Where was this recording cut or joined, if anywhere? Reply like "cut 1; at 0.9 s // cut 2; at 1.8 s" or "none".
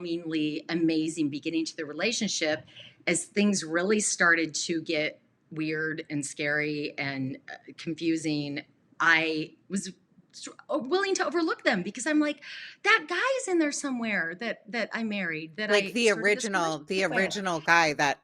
cut 1; at 15.7 s

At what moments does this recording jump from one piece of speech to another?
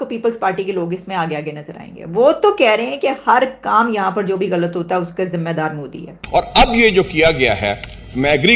cut 1; at 6.1 s

